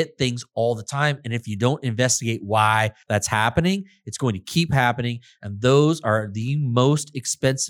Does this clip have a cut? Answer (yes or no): yes